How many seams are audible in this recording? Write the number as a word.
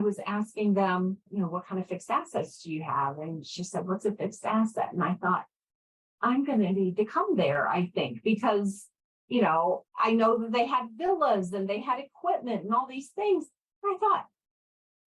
one